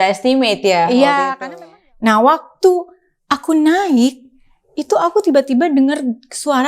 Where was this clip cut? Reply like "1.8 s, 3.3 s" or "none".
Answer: 1.3 s